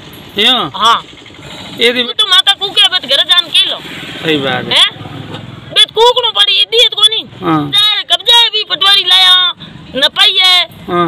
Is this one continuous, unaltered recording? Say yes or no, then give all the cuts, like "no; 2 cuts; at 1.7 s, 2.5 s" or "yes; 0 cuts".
no; 2 cuts; at 2.1 s, 7.9 s